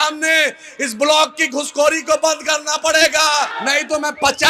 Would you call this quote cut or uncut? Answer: cut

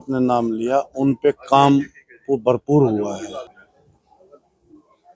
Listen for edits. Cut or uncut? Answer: cut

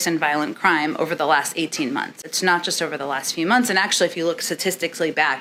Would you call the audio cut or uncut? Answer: uncut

